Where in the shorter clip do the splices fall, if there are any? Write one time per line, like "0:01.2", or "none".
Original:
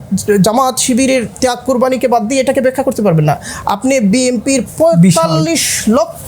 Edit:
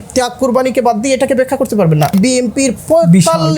0:02.1

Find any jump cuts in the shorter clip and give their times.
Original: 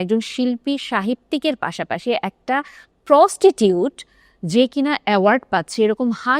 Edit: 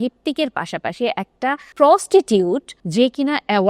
0:01.7
0:02.8

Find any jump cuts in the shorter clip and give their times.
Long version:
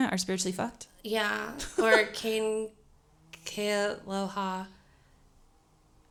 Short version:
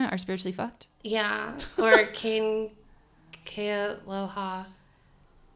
none

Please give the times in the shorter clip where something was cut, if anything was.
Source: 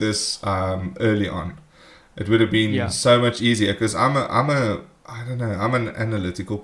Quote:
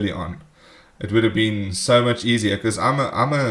none

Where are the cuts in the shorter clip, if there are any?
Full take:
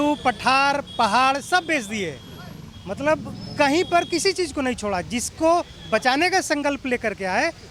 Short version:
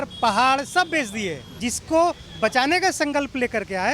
0:01.7

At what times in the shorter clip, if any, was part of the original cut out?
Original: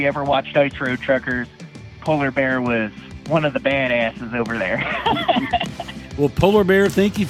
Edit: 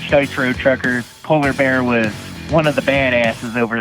0:01.1

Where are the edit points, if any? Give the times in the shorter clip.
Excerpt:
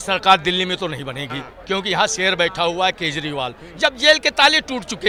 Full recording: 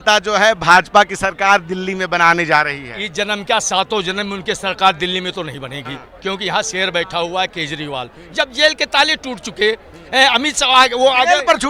none

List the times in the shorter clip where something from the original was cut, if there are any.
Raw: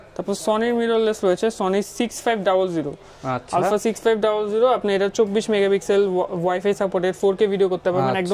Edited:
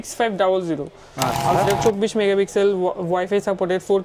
0:01.6

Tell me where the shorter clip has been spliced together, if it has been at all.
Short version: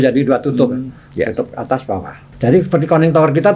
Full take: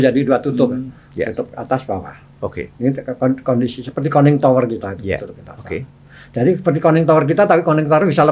0:02.2

